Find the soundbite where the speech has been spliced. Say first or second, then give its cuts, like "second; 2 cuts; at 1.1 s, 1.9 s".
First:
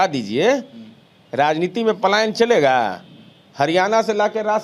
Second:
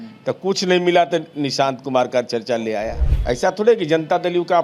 second; 1 cut; at 3.1 s